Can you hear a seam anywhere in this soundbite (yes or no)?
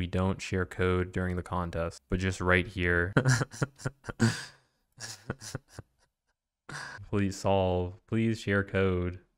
yes